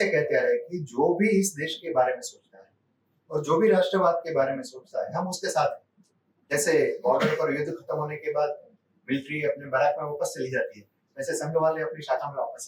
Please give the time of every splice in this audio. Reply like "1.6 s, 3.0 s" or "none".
6.5 s